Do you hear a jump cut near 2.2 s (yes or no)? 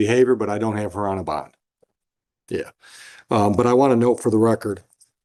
no